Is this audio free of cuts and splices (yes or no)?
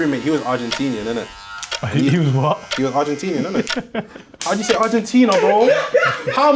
yes